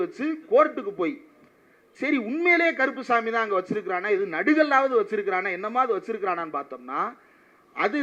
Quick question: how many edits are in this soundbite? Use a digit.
0